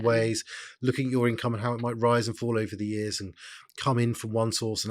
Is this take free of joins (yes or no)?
yes